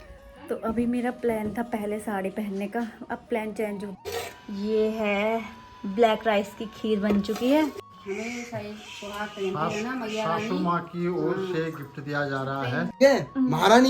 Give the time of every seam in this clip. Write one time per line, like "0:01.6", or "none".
0:04.0
0:07.8
0:13.0